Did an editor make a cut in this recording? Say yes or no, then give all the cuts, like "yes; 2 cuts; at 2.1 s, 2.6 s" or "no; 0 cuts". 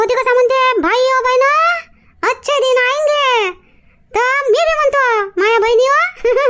no; 0 cuts